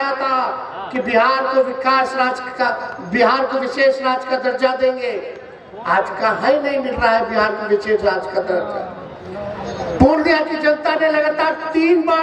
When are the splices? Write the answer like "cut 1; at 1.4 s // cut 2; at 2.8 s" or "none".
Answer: none